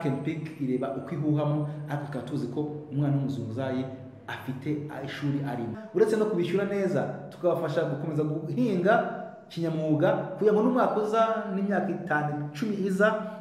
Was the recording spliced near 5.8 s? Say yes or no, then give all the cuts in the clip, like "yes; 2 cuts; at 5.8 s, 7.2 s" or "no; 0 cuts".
yes; 1 cut; at 5.8 s